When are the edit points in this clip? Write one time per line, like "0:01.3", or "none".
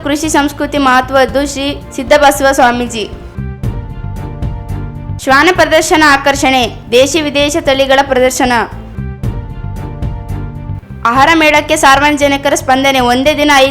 0:08.9
0:10.8

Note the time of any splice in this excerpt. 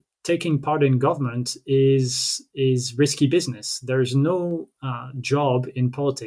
none

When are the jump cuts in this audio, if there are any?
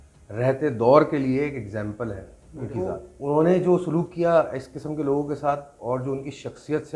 0:03.0

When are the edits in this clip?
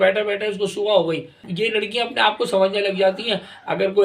0:01.5

